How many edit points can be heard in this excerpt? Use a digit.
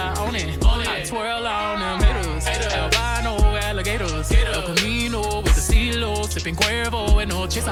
0